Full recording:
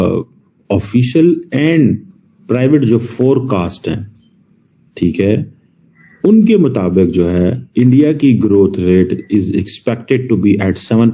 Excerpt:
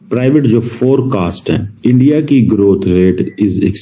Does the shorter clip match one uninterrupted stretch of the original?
no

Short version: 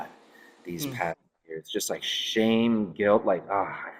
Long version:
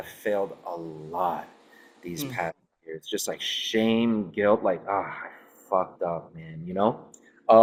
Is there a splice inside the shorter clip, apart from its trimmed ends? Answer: no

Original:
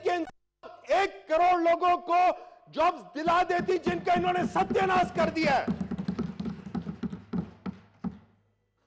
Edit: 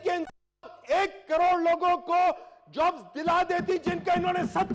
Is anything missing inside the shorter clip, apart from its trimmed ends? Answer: no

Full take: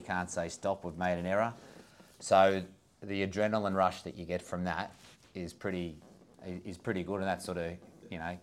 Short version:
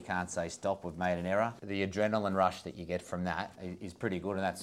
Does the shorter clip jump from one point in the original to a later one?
yes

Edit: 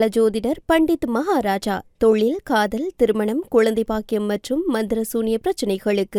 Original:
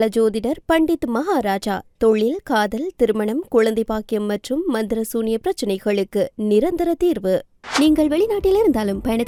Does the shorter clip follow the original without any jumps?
yes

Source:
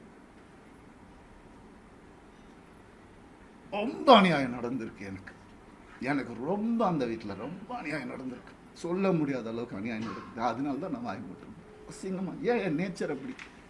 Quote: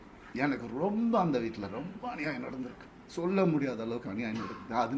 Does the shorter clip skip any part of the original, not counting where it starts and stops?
no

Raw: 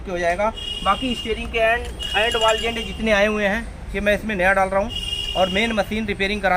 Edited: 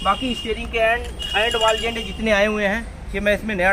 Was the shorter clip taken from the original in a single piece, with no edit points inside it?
yes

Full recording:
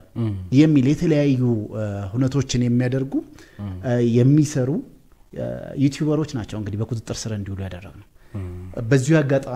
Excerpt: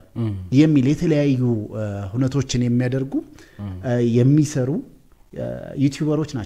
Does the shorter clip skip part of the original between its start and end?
no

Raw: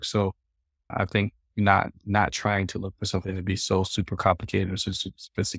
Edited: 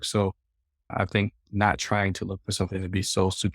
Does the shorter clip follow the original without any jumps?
no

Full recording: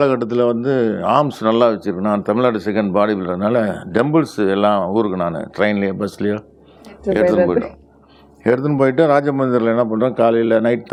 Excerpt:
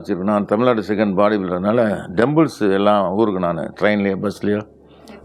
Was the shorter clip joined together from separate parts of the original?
no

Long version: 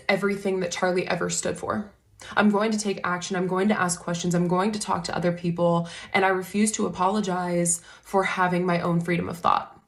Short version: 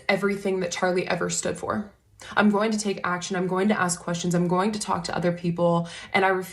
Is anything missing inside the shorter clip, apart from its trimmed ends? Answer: no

